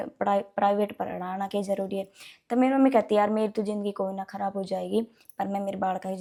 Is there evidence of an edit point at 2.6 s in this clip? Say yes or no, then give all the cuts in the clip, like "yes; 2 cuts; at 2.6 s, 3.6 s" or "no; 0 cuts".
no; 0 cuts